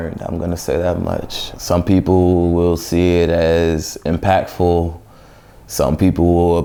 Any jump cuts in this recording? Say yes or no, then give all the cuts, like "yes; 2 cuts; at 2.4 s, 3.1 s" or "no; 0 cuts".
no; 0 cuts